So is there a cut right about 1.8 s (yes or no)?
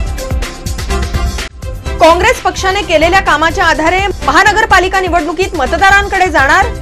no